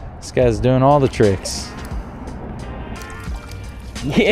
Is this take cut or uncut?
cut